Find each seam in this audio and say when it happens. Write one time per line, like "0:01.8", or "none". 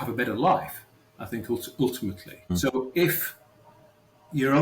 0:02.5